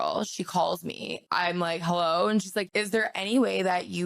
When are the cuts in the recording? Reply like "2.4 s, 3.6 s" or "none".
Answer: 1.2 s, 2.7 s